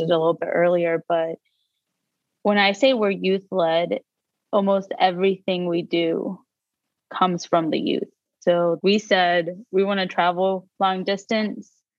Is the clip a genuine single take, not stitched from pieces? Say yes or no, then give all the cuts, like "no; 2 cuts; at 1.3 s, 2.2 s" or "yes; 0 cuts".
no; 1 cut; at 10.7 s